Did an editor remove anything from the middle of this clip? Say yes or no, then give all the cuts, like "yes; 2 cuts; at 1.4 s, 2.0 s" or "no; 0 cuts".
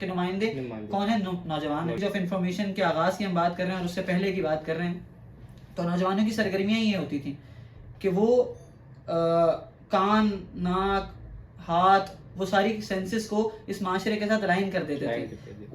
yes; 1 cut; at 2.0 s